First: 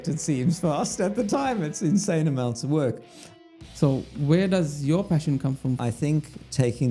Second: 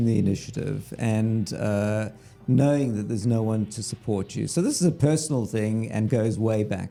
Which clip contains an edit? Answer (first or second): first